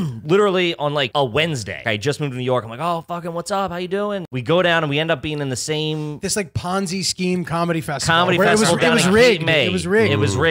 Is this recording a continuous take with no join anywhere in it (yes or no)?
no